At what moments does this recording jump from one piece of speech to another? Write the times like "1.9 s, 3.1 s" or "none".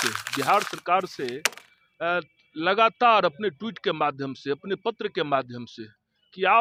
none

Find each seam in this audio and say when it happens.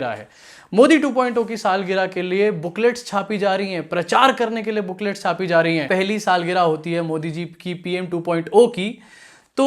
5.8 s

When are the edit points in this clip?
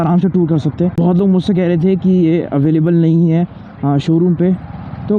0.9 s

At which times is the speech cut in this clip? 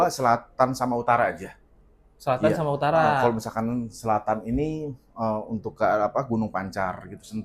none

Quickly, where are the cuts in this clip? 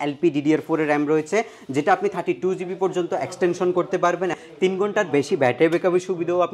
4.4 s

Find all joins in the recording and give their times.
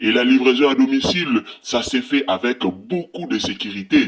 none

